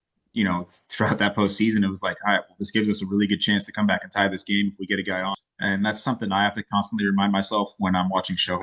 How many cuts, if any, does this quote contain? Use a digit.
1